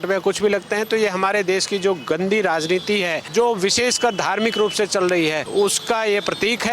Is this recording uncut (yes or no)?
no